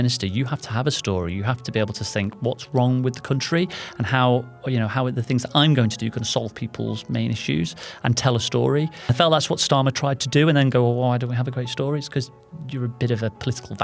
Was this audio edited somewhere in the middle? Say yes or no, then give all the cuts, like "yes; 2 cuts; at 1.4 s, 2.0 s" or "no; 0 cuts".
yes; 1 cut; at 9.1 s